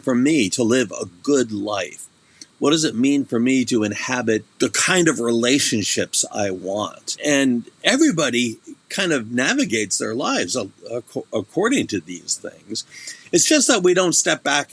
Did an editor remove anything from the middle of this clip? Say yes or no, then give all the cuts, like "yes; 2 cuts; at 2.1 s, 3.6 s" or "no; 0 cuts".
yes; 2 cuts; at 4.5 s, 7.2 s